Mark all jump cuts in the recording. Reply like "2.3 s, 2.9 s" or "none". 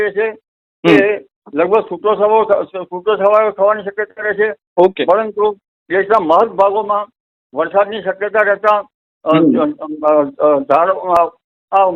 none